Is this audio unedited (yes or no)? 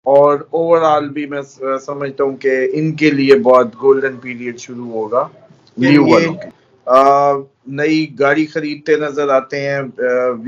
no